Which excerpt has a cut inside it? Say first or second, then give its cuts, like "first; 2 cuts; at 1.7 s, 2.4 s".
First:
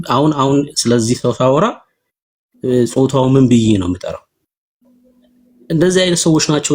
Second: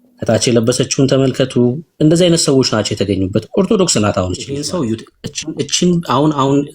second; 1 cut; at 4.6 s